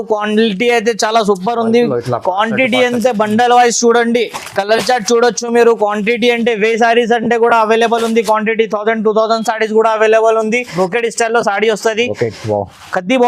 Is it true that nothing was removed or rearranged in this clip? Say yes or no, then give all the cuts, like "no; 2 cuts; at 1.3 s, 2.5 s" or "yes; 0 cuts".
no; 1 cut; at 10.7 s